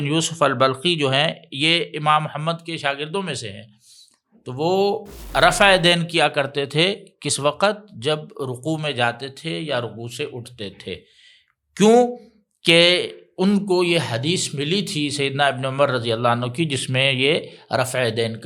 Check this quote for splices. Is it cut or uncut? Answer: uncut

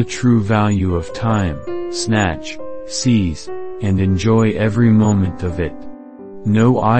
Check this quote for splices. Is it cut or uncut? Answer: uncut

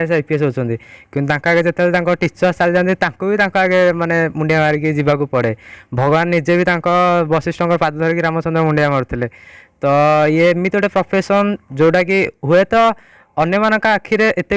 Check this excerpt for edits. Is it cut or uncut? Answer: uncut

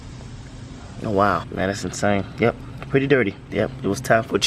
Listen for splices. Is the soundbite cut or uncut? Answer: cut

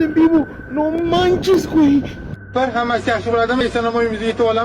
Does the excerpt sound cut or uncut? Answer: cut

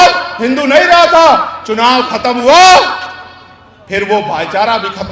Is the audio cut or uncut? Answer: uncut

